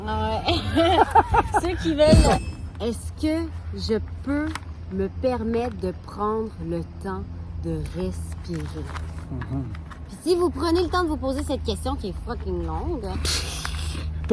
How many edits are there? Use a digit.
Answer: 1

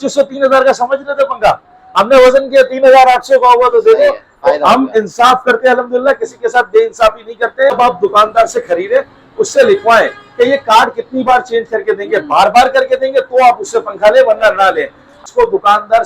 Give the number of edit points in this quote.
2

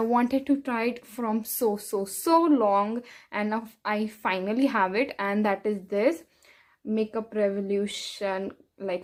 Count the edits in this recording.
0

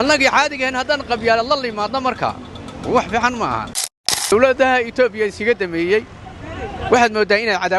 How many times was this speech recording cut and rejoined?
1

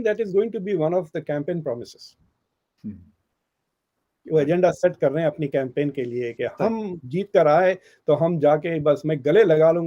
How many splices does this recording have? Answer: 0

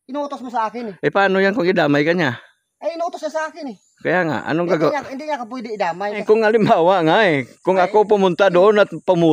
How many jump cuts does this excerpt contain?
1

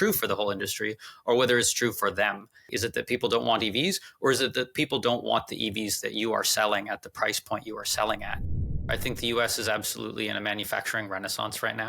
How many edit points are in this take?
2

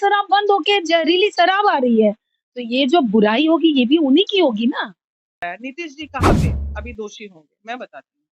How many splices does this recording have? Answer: 1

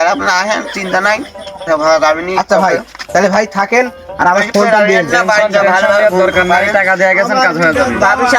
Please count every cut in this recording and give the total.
0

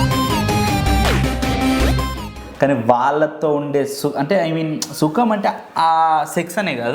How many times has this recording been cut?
1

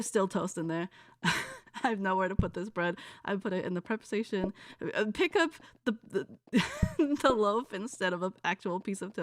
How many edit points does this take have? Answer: 0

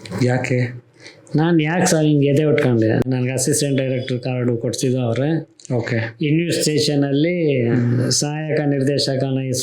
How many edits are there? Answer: 1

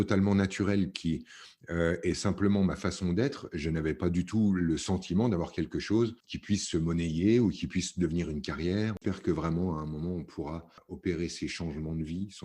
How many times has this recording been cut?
3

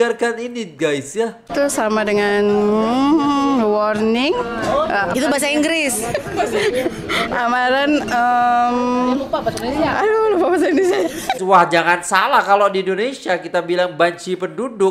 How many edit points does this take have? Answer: 2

